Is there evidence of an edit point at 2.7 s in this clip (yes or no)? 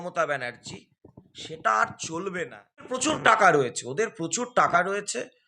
yes